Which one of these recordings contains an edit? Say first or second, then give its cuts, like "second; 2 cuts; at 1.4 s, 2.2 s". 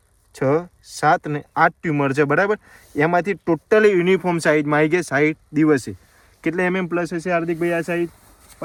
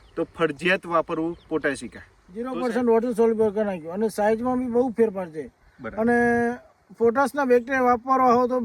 second; 1 cut; at 2.5 s